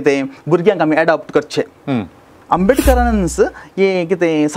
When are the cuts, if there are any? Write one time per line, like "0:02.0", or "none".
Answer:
0:02.3